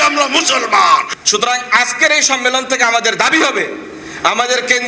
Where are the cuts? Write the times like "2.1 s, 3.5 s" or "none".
1.1 s